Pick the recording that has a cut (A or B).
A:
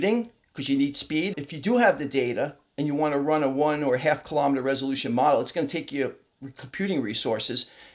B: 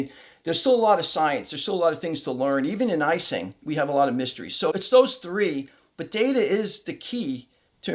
A